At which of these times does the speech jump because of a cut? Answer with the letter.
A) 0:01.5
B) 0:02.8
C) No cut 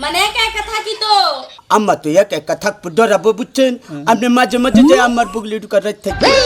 A